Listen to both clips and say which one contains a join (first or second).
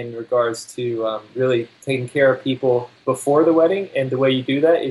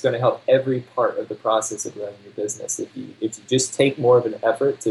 first